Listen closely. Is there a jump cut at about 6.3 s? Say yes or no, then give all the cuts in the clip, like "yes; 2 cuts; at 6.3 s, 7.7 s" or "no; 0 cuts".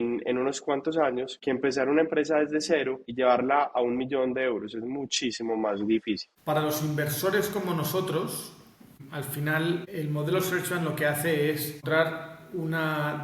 yes; 6 cuts; at 1.3 s, 3.0 s, 6.3 s, 8.9 s, 9.9 s, 11.8 s